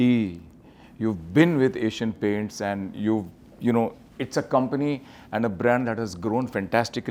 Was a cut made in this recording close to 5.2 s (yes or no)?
no